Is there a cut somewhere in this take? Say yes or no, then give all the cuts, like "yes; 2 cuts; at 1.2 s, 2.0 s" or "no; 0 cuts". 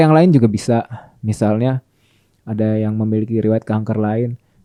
no; 0 cuts